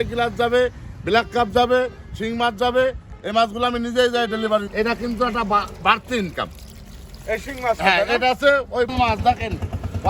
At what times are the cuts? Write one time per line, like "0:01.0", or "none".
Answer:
0:04.7
0:08.9